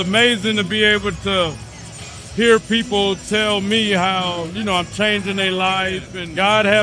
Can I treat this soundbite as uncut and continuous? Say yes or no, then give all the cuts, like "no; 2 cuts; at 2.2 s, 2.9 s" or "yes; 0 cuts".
yes; 0 cuts